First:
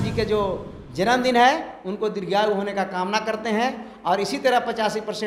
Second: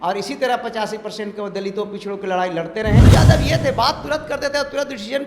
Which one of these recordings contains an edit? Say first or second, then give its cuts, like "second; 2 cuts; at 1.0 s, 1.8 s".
second; 1 cut; at 3.0 s